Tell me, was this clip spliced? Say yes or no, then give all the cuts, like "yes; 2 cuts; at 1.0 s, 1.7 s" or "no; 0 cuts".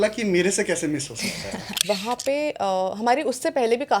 yes; 1 cut; at 1.7 s